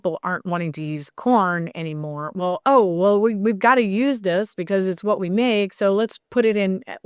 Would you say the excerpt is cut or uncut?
uncut